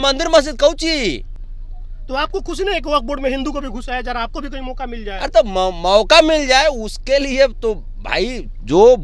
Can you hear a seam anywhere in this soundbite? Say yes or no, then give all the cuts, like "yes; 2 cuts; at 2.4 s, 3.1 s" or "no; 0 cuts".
no; 0 cuts